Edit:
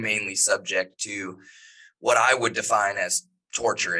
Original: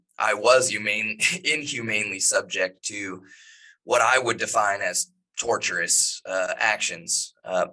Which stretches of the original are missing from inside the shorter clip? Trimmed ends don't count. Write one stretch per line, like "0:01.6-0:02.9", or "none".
none